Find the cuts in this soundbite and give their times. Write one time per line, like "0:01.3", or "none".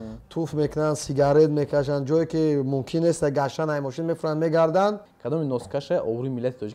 0:05.1